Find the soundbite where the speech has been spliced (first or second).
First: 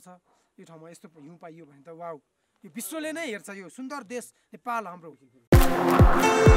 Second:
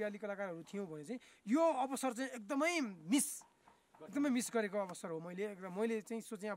first